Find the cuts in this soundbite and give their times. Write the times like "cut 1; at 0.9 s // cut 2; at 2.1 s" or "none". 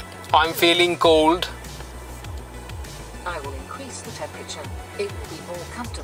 none